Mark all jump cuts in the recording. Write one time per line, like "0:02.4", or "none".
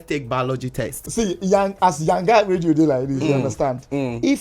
0:01.0